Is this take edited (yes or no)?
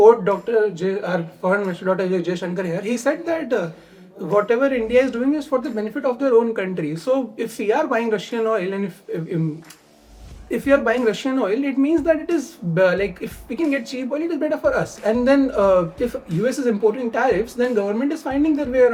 no